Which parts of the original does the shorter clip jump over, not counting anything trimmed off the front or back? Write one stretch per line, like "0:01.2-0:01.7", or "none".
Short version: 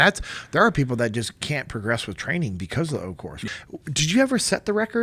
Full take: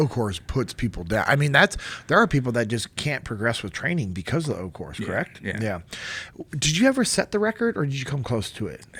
0:05.0-0:06.1

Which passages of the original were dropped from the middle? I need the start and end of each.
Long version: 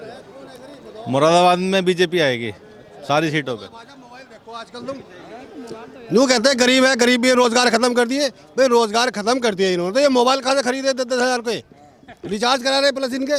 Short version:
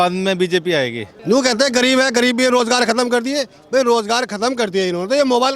0:02.5-0:05.9

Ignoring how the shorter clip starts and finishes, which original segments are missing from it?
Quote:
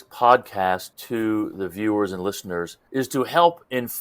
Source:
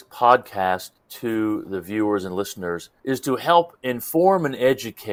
0:00.9-0:01.1

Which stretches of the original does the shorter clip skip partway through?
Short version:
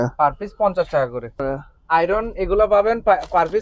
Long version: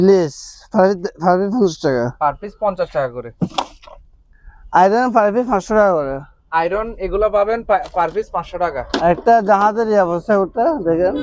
0:03.4-0:06.0

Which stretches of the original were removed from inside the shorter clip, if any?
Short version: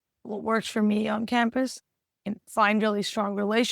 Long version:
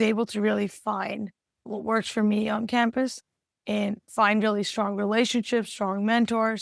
0:03.7-0:03.9

